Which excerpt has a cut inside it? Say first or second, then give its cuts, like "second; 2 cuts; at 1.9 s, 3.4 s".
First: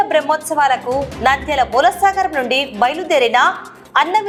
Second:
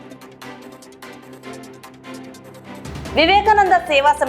second; 2 cuts; at 0.7 s, 2.2 s